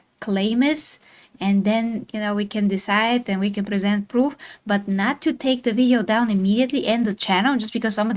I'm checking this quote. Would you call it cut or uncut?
uncut